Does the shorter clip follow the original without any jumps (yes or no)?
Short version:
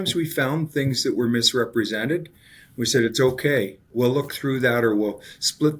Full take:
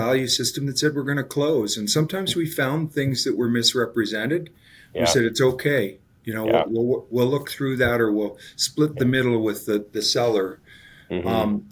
no